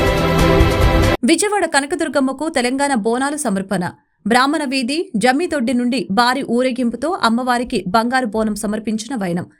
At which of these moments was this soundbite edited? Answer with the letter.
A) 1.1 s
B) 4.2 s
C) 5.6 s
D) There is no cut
A